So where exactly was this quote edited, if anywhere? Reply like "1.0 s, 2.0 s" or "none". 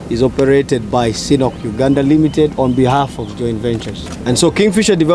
4.2 s